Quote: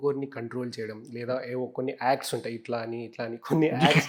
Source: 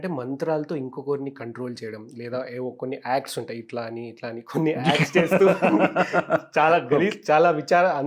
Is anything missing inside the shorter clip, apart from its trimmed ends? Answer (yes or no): no